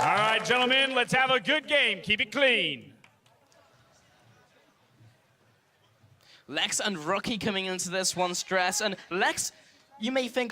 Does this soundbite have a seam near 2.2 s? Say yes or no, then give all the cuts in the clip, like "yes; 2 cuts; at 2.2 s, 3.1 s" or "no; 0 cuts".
yes; 1 cut; at 2.2 s